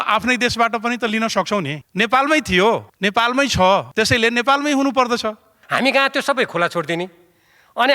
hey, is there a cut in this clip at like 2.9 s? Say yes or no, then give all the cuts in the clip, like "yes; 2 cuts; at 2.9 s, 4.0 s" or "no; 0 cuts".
yes; 4 cuts; at 1.8 s, 2.9 s, 3.9 s, 5.5 s